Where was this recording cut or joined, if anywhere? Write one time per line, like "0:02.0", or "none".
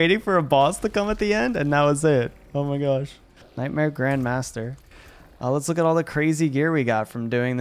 0:03.5